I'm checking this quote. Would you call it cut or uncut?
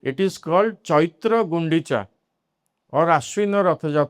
uncut